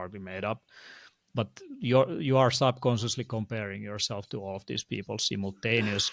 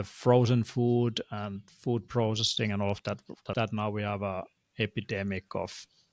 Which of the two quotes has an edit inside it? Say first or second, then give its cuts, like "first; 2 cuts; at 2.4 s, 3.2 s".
second; 1 cut; at 3.5 s